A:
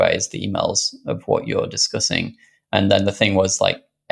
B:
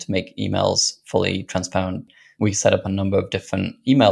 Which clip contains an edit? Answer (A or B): B